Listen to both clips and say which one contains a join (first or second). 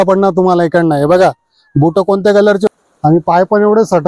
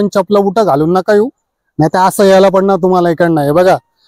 first